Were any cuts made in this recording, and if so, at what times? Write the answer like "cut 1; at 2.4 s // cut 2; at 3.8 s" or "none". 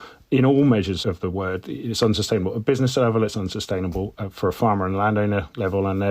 cut 1; at 1.0 s